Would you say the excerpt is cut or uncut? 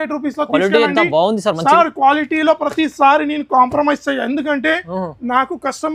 uncut